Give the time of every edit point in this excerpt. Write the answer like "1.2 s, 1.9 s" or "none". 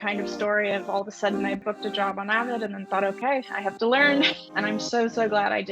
1.6 s, 4.4 s